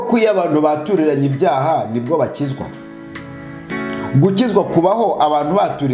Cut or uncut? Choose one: uncut